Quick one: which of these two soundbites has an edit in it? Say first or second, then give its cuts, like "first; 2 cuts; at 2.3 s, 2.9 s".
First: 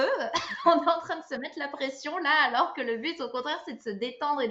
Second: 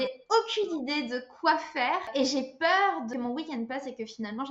second; 2 cuts; at 2.1 s, 3.1 s